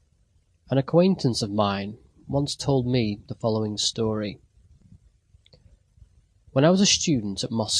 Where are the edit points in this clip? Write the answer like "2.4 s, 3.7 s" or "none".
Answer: 2.0 s